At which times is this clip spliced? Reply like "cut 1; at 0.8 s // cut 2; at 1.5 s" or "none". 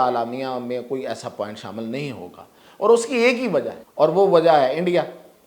cut 1; at 3.8 s